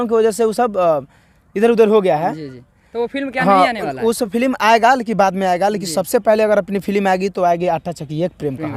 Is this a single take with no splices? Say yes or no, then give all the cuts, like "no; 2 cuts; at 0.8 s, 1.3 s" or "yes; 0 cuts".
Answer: yes; 0 cuts